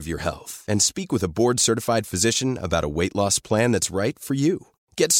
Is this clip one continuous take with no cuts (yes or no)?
yes